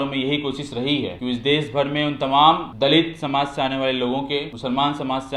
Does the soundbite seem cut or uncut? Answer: cut